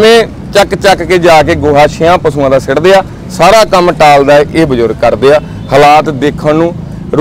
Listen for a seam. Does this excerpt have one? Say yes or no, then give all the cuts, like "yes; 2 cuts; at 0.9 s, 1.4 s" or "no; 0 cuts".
no; 0 cuts